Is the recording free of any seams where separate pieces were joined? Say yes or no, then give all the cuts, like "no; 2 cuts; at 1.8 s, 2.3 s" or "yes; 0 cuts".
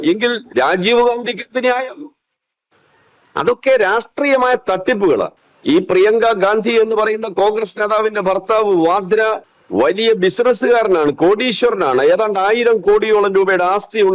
no; 2 cuts; at 5.4 s, 9.5 s